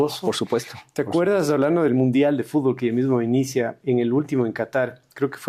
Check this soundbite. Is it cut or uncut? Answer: uncut